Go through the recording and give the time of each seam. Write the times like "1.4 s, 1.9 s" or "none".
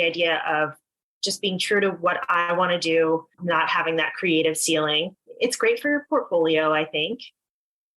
3.3 s, 5.2 s